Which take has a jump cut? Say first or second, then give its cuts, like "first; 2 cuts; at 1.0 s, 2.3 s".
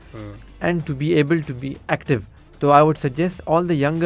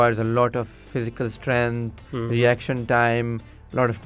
first; 1 cut; at 2.4 s